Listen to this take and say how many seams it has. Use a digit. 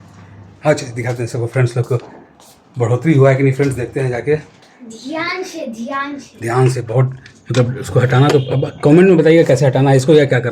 0